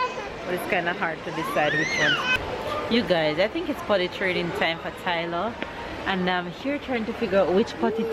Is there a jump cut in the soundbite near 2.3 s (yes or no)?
yes